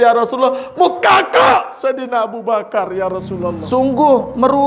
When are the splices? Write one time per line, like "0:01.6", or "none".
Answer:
0:03.3